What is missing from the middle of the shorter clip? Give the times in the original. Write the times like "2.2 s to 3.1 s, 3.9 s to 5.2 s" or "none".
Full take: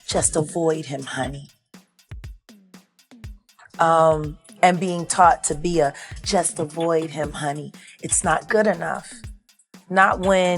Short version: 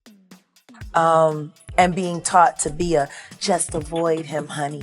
3.4 s to 3.8 s